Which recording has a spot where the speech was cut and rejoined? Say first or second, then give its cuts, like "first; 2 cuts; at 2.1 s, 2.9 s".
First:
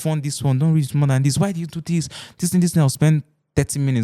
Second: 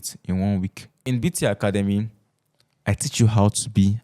second; 1 cut; at 1.1 s